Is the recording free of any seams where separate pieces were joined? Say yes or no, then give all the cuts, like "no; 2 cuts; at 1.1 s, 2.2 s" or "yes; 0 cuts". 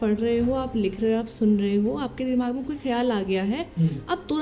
yes; 0 cuts